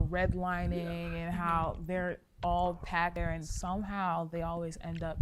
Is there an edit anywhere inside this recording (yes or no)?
yes